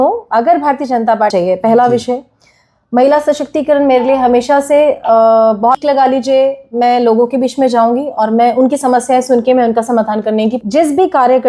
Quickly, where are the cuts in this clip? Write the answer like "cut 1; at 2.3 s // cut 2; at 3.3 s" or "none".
cut 1; at 1.3 s // cut 2; at 5.8 s // cut 3; at 10.6 s